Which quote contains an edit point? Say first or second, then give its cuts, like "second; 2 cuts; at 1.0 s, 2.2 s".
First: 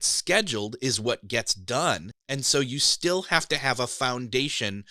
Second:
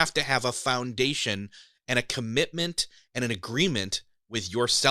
first; 1 cut; at 2.2 s